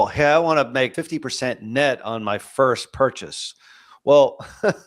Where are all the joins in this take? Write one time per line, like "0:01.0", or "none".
0:00.9